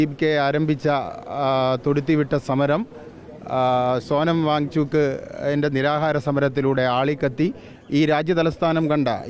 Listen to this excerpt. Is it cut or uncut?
cut